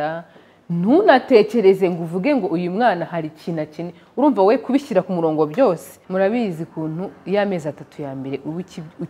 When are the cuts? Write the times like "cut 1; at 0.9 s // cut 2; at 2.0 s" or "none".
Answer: cut 1; at 6.0 s